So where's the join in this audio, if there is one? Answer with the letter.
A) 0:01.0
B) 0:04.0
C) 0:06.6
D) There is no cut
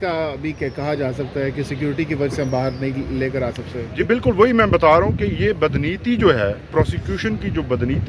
B